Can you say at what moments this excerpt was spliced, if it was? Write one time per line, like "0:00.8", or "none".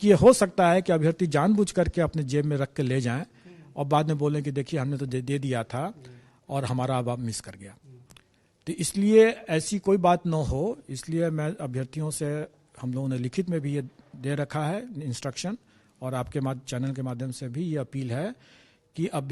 none